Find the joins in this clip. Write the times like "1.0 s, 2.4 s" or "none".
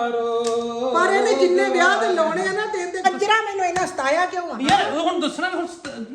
3.0 s